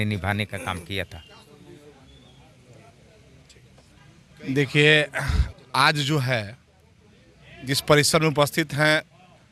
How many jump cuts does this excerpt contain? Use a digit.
0